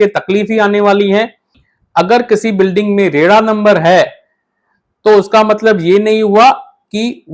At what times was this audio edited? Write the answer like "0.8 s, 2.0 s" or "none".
1.6 s